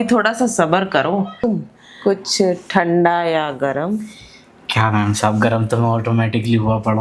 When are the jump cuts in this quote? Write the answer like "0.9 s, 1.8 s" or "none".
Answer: 1.4 s